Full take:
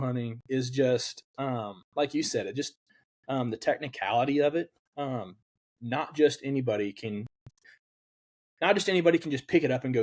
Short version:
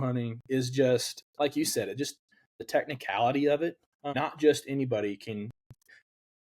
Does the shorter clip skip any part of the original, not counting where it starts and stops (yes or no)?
yes